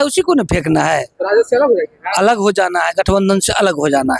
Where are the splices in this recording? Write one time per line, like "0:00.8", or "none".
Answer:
none